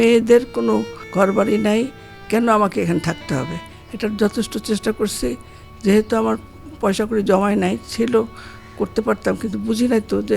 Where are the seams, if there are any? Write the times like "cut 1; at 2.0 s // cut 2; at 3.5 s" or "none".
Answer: cut 1; at 1.0 s